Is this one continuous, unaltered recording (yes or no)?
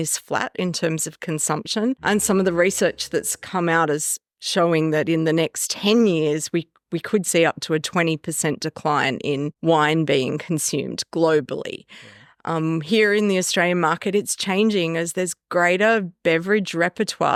yes